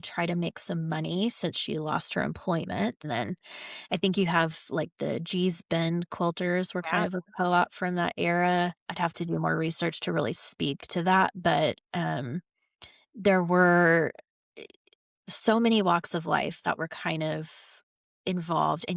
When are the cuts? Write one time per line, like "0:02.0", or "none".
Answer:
0:03.0
0:08.8